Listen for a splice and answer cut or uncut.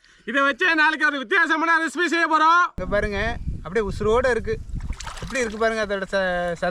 cut